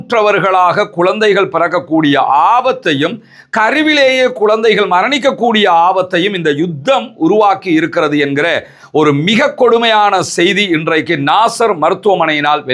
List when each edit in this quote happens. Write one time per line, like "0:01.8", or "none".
none